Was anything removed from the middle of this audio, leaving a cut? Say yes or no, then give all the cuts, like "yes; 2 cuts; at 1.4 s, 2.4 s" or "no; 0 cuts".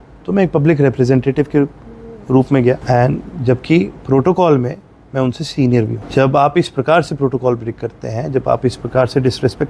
yes; 2 cuts; at 2.8 s, 6.0 s